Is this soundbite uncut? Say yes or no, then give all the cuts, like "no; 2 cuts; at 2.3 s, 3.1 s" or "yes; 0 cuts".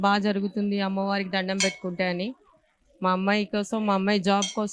yes; 0 cuts